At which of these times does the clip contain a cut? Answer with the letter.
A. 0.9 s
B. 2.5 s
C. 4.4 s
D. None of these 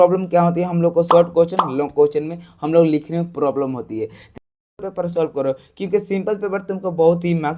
C